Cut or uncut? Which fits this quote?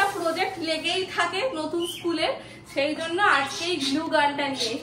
uncut